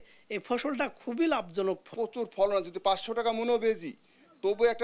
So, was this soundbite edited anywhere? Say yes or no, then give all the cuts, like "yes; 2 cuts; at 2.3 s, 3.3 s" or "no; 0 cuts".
yes; 1 cut; at 1.9 s